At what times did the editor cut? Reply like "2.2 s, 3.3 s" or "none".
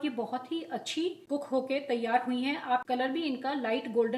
1.2 s, 2.8 s